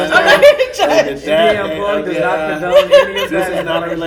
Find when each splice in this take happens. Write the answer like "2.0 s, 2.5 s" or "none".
none